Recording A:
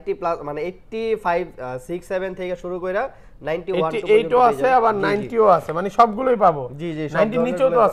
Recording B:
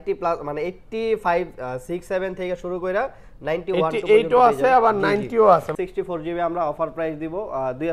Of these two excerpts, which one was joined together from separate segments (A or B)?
B